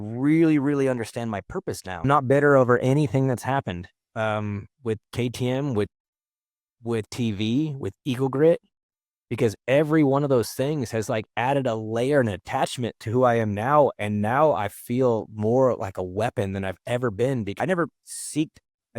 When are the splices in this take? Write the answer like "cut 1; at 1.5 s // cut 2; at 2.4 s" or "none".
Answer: cut 1; at 2.0 s // cut 2; at 17.6 s